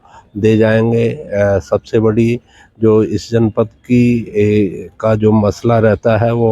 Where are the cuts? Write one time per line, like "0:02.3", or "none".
none